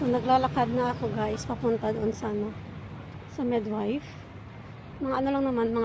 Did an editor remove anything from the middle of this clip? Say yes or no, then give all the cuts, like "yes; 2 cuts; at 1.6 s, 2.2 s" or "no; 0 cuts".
no; 0 cuts